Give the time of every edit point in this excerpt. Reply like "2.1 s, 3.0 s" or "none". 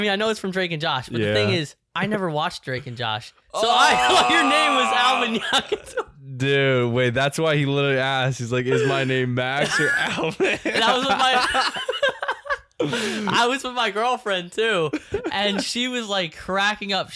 none